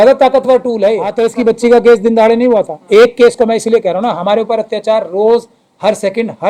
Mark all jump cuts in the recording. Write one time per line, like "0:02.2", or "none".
0:01.1